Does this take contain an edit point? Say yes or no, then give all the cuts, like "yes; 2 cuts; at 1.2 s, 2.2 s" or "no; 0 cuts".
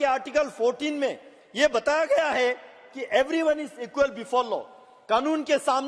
no; 0 cuts